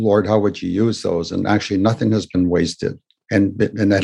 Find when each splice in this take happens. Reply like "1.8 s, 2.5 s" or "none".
none

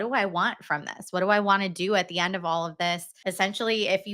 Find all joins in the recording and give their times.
3.1 s

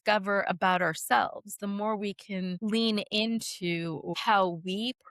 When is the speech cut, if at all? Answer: 2.6 s, 4.1 s

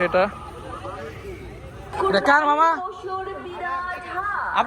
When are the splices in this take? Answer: 1.9 s

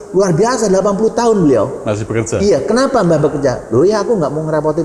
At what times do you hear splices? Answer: none

